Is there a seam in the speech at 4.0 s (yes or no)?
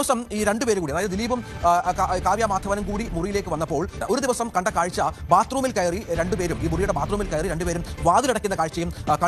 yes